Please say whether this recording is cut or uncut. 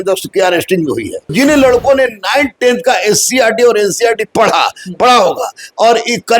cut